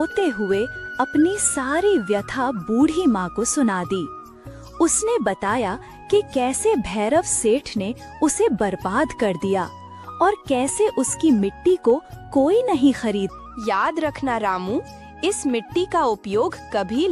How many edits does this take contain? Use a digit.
1